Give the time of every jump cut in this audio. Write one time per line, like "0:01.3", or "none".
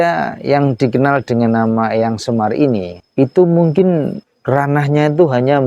0:03.0
0:04.3